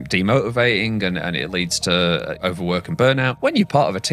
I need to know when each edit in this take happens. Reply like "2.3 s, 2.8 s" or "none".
2.4 s, 3.3 s